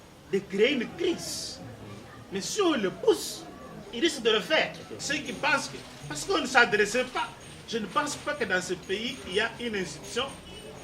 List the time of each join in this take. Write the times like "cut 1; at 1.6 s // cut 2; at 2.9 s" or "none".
cut 1; at 4.9 s